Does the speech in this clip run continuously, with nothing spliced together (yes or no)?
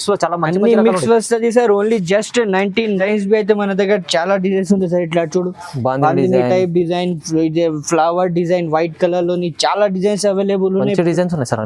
no